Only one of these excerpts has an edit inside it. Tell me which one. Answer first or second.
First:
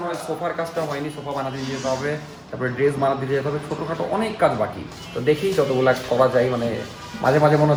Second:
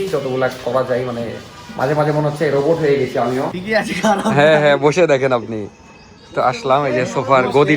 second